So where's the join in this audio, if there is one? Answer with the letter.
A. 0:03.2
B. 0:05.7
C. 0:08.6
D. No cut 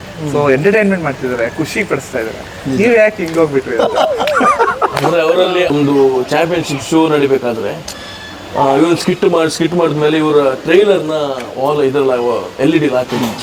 B